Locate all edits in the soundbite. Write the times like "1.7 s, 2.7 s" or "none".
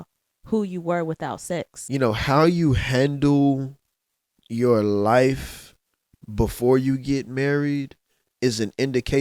1.8 s